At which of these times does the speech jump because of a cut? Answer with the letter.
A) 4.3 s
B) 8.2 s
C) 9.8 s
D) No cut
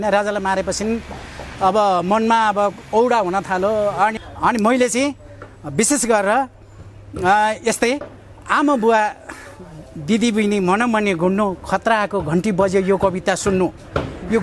A